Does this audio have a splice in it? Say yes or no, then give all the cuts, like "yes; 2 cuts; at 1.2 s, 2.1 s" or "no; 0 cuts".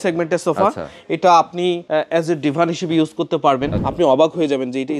yes; 2 cuts; at 1.8 s, 3.8 s